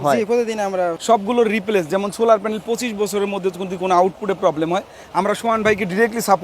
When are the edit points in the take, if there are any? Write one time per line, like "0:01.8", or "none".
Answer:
0:00.9